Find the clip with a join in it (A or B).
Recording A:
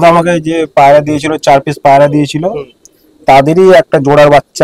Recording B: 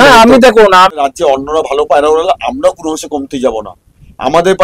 B